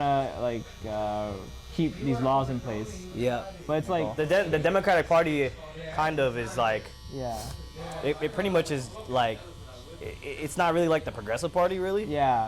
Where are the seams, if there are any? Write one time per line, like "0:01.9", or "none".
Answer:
0:04.1